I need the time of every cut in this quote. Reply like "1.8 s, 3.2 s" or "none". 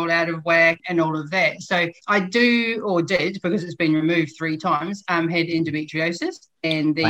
0.8 s, 2.0 s